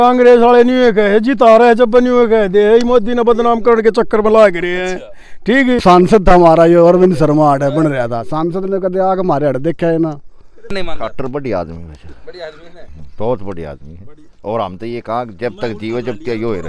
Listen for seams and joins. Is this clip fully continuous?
no; 2 cuts; at 5.8 s, 10.7 s

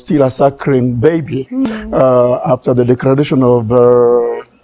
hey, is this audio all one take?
no; 1 cut; at 1.7 s

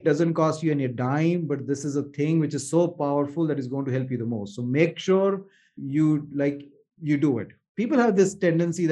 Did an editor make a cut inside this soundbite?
yes; 2 cuts; at 5.8 s, 7.6 s

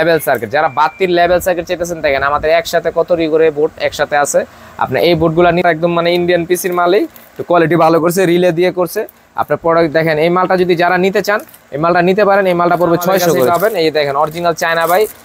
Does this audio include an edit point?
yes; 2 cuts; at 5.6 s, 13.5 s

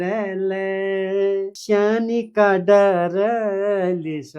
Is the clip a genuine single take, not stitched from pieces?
no; 1 cut; at 1.6 s

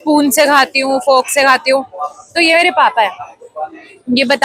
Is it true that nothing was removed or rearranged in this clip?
yes; 0 cuts

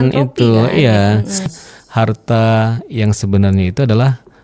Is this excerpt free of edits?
no; 1 cut; at 1.5 s

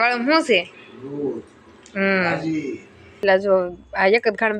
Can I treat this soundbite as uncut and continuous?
no; 1 cut; at 3.2 s

